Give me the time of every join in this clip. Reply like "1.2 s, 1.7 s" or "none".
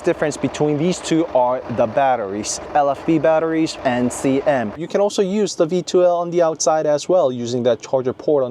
2.6 s, 3.8 s, 4.8 s